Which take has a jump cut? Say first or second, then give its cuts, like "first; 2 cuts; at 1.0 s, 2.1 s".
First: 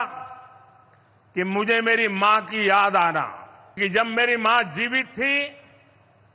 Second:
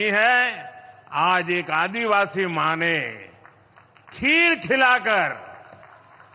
first; 1 cut; at 3.8 s